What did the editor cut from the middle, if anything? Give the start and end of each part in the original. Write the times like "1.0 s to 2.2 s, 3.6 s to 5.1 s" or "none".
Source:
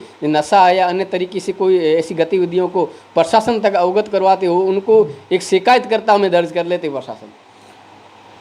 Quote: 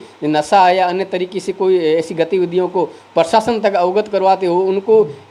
none